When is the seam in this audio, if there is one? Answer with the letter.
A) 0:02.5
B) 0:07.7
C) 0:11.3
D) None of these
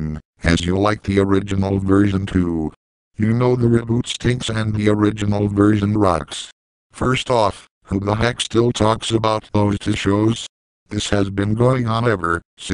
A